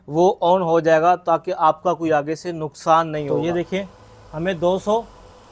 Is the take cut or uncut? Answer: cut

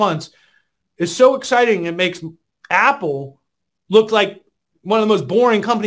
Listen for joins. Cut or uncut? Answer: uncut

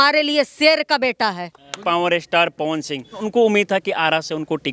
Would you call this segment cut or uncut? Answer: cut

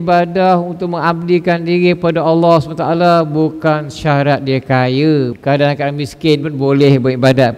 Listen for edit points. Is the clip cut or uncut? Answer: cut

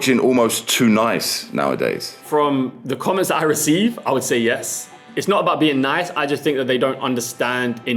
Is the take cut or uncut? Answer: cut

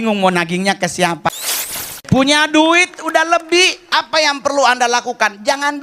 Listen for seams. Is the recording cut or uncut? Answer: cut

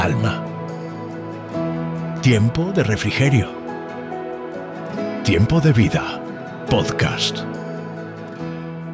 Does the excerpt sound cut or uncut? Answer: uncut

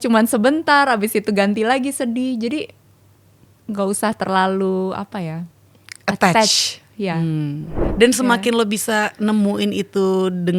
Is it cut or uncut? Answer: cut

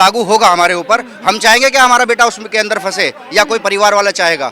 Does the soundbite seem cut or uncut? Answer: uncut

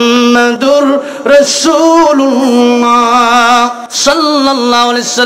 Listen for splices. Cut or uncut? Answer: cut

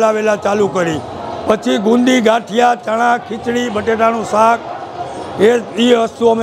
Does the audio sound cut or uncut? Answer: uncut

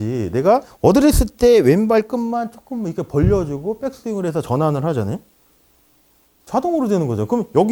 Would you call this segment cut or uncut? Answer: uncut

